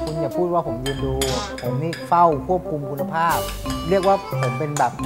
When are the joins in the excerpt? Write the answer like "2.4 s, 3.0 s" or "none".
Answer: none